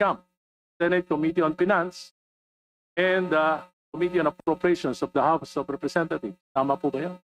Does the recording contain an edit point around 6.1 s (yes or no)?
yes